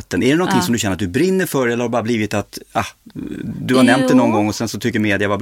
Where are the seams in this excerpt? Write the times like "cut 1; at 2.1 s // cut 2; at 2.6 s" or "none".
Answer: none